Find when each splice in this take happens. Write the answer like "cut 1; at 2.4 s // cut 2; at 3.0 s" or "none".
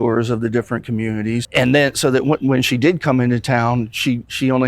cut 1; at 1.4 s